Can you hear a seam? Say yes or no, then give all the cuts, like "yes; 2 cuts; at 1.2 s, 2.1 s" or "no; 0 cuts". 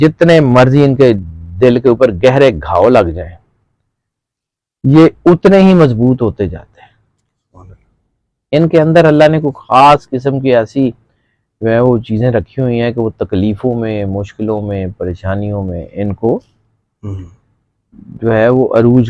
no; 0 cuts